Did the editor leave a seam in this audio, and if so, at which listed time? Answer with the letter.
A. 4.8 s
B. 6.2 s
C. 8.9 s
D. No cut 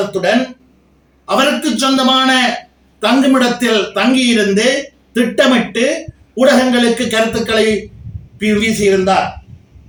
D